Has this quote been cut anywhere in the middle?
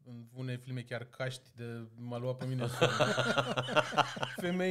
no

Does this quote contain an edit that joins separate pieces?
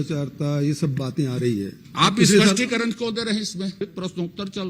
yes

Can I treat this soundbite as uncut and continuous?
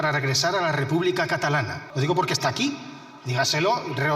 no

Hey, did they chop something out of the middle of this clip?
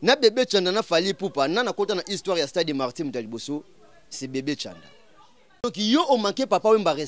yes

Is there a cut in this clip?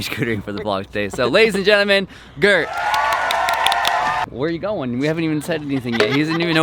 yes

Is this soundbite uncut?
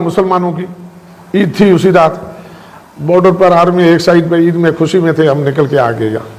yes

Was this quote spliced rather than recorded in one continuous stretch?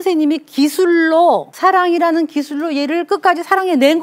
yes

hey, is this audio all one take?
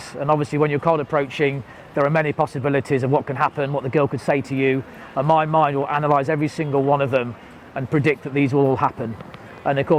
yes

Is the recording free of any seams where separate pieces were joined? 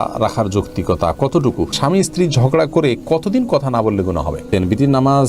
no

